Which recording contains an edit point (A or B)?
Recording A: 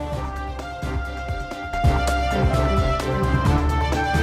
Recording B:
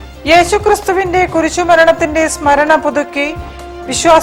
A